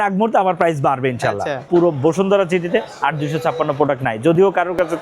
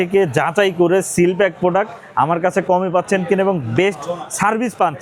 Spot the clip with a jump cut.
first; 1 cut; at 1.7 s

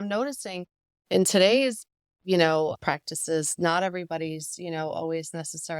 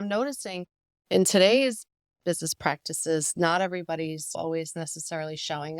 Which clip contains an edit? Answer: second; 2 cuts; at 2.3 s, 4.4 s

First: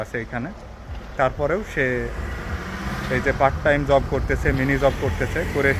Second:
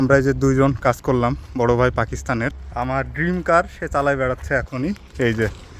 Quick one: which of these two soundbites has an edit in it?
second; 1 cut; at 2.6 s

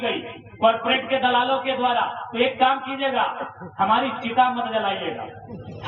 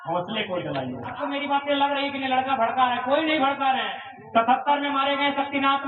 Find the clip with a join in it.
second; 1 cut; at 1.2 s

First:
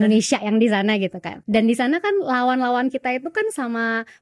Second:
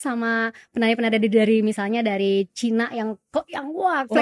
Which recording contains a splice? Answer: first; 1 cut; at 1.4 s

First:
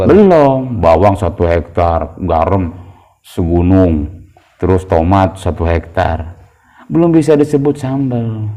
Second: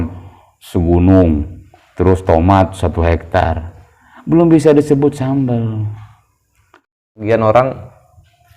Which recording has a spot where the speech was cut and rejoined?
second; 1 cut; at 7.0 s

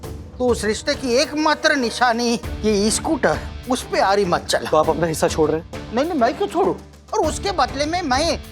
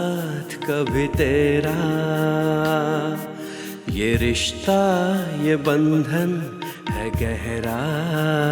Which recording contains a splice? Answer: first; 2 cuts; at 4.6 s, 6.9 s

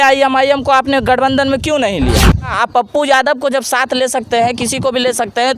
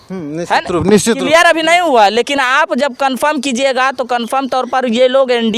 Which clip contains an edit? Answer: first; 1 cut; at 2.5 s

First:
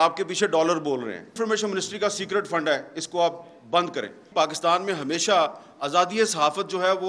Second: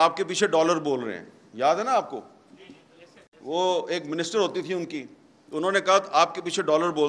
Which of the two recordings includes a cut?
first; 2 cuts; at 1.3 s, 4.2 s

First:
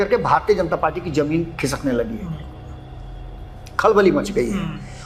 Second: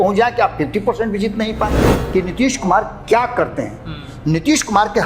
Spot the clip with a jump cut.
second; 1 cut; at 1.9 s

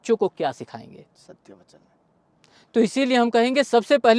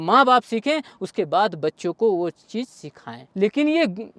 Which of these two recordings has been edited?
second; 1 cut; at 3.2 s

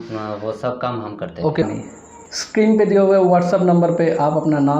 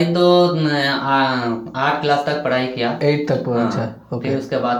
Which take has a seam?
first; 1 cut; at 1.6 s

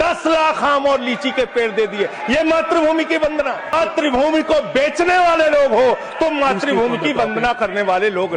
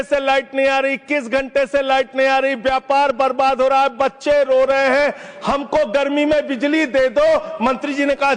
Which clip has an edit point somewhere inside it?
first; 1 cut; at 3.7 s

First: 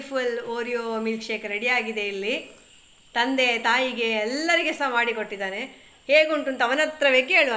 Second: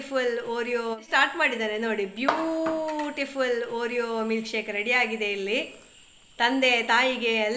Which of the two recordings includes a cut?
first; 1 cut; at 0.9 s

